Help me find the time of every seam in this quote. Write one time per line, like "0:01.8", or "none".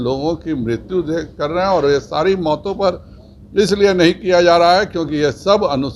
none